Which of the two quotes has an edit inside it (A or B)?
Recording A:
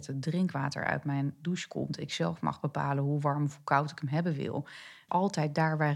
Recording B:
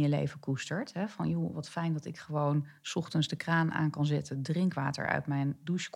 A